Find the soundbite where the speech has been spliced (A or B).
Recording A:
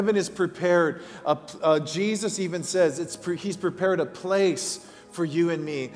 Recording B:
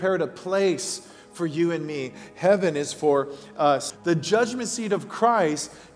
B